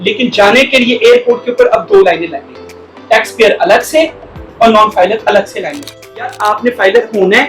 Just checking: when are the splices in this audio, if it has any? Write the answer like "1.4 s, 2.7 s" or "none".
6.4 s